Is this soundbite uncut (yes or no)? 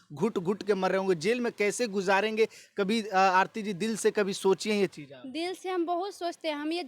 yes